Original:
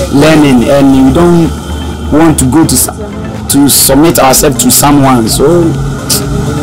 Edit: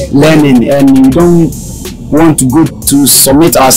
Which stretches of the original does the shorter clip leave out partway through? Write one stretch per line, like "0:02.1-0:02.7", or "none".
0:02.8-0:03.4